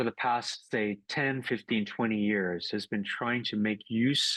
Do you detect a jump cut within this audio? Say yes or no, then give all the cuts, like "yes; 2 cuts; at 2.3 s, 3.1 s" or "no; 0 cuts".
no; 0 cuts